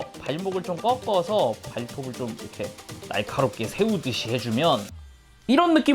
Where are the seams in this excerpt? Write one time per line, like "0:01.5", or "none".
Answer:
0:02.9

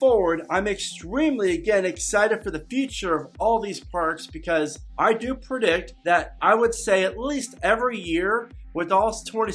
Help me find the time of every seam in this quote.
0:04.8
0:05.9

